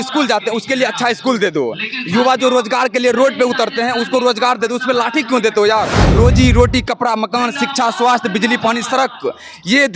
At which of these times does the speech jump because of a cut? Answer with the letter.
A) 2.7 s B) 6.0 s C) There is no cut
B